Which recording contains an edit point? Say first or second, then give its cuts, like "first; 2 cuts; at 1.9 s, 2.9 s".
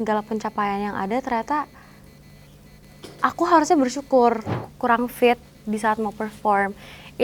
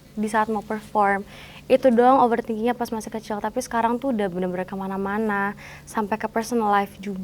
first; 1 cut; at 4.6 s